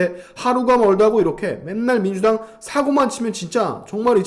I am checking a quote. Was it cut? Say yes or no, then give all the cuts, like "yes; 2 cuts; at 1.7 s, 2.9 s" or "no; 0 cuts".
no; 0 cuts